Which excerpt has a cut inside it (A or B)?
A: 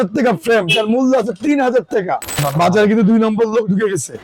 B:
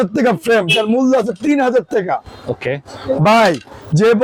A